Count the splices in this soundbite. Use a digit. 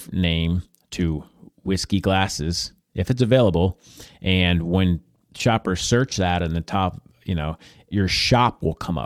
2